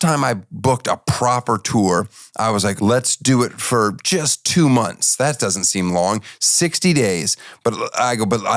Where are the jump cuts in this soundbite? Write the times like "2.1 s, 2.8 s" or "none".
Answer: 2.8 s